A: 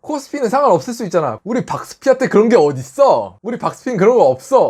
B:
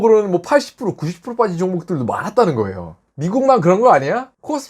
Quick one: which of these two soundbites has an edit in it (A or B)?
B